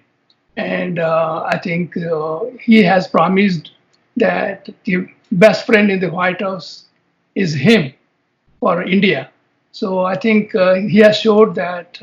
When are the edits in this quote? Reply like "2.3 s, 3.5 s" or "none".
none

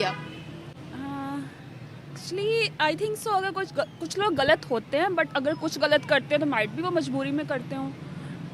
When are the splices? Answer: none

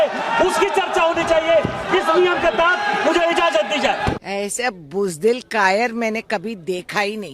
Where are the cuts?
4.2 s

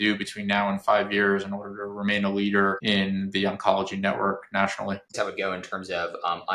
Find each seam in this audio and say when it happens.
5.1 s

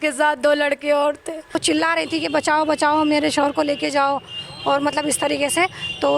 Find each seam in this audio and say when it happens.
1.6 s

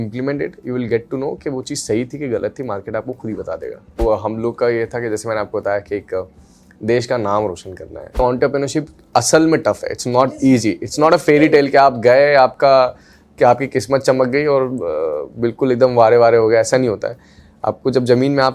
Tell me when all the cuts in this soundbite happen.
4.0 s, 8.2 s

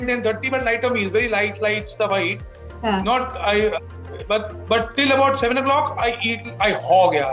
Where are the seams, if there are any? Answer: none

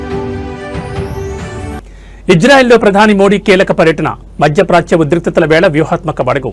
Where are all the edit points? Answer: 1.7 s

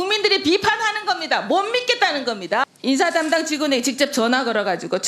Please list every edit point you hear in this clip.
2.6 s

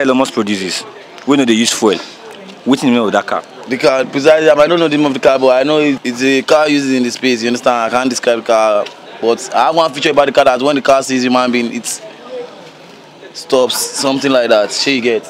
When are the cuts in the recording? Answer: none

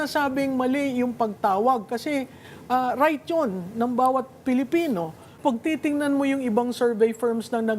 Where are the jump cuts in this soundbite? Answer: 5.3 s

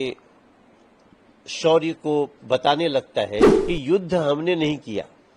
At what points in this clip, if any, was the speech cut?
3.5 s

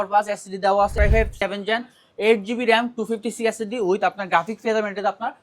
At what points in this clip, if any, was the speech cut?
0.9 s

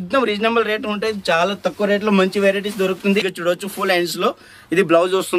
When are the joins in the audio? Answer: 3.3 s

